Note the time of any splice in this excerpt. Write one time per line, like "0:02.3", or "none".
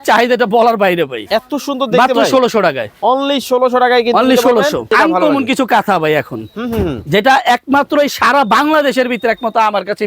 0:04.9